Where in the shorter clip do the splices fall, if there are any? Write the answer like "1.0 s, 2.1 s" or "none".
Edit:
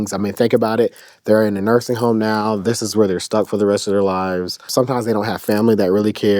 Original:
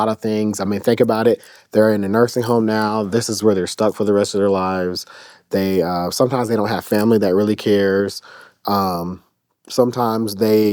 4.7 s